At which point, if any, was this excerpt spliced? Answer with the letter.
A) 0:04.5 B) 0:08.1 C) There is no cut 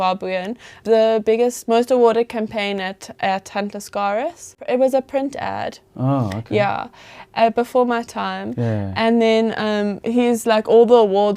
A